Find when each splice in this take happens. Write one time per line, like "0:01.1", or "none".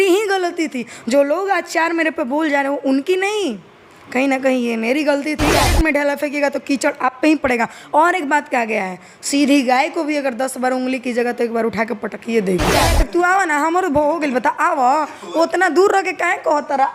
0:05.7
0:12.9